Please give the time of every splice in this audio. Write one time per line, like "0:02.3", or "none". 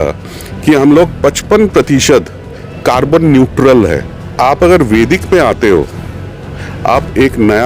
0:04.3